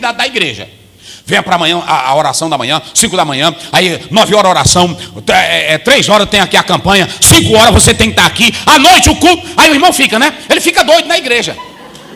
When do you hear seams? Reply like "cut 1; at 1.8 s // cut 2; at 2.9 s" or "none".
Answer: none